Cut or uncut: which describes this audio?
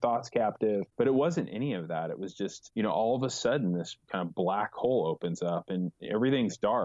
cut